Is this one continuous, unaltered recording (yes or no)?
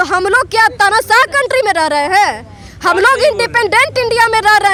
yes